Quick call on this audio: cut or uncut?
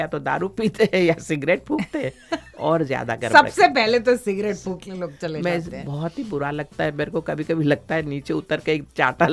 uncut